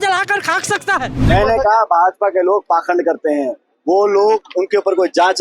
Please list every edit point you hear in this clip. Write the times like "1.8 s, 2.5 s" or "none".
1.2 s